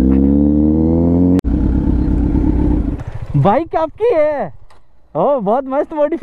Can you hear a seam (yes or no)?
yes